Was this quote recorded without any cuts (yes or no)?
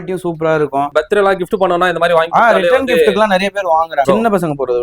no